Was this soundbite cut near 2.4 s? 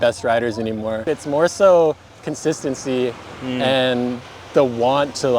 no; 1 cut; at 1.2 s

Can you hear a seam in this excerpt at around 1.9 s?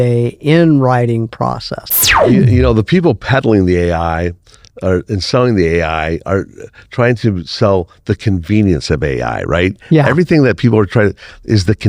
yes; 1 cut; at 1.9 s

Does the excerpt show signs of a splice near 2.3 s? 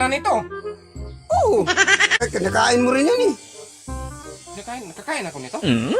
yes; 1 cut; at 2.3 s

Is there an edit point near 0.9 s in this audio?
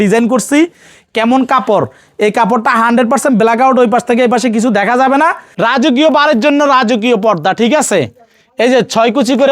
no; 1 cut; at 5.5 s

